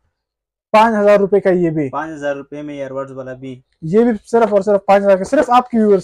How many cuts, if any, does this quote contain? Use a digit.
0